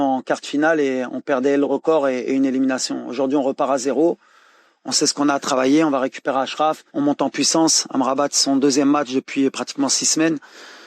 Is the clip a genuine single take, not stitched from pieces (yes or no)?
no